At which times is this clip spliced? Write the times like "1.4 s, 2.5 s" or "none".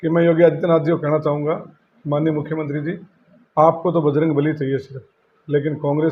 none